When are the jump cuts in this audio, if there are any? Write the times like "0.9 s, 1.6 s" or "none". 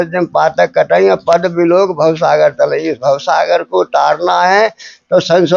none